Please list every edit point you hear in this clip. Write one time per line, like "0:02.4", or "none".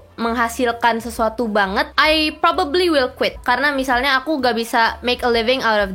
0:01.9
0:03.4